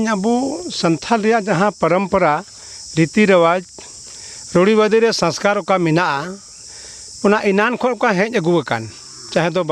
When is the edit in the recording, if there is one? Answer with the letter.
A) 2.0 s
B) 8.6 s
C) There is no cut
C